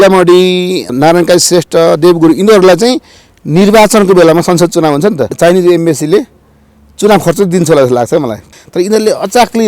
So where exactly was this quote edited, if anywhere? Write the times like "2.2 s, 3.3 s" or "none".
0.9 s, 5.3 s, 8.4 s